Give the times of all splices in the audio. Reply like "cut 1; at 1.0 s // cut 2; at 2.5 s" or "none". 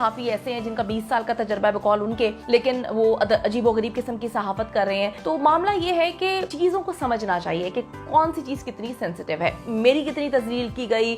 cut 1; at 2.4 s // cut 2; at 5.2 s // cut 3; at 6.5 s // cut 4; at 9.6 s